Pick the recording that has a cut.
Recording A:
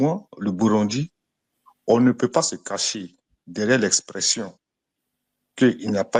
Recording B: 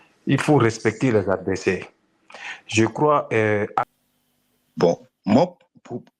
B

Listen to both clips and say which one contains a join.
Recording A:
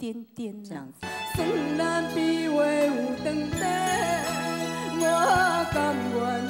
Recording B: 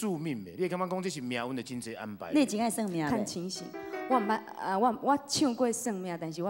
A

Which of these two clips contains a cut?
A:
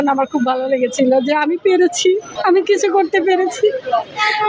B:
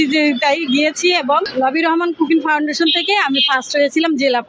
B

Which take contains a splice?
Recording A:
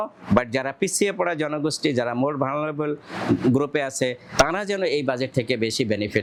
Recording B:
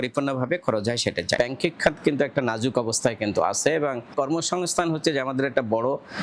B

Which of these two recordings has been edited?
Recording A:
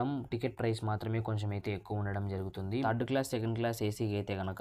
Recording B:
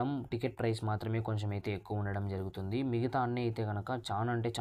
A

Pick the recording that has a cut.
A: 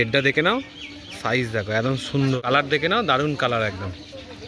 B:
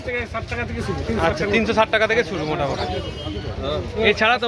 A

